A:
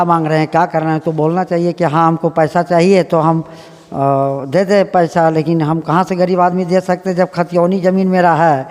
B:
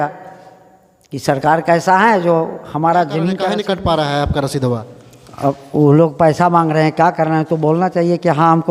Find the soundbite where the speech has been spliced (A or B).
B